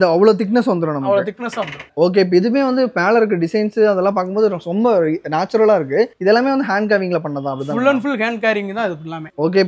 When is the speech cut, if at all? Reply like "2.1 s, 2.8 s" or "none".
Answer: none